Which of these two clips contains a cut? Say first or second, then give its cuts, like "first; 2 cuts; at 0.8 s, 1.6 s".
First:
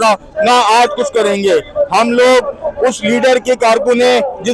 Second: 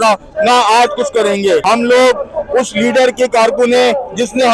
second; 1 cut; at 1.6 s